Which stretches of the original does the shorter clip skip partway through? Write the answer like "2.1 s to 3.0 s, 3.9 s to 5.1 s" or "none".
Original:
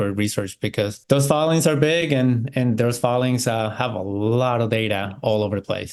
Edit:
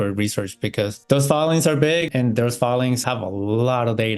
2.1 s to 2.5 s, 3.4 s to 3.7 s